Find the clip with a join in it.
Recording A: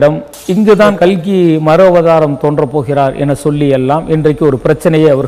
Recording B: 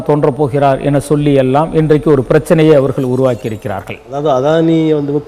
B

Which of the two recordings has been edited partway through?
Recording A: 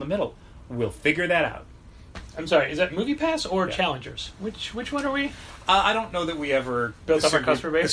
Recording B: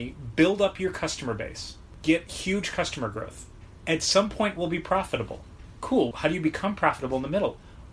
B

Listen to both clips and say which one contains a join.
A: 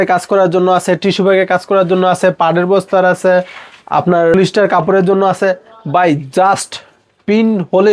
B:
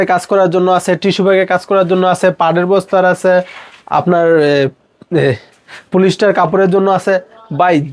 A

